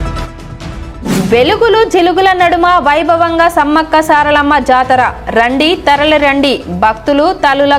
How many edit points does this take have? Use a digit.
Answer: 1